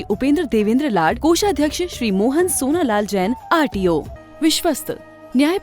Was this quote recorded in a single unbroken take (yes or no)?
no